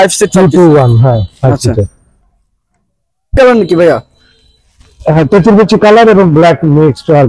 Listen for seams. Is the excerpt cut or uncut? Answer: cut